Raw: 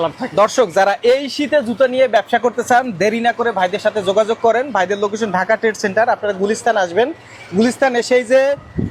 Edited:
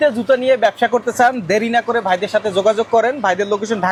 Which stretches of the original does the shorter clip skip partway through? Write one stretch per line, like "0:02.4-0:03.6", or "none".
none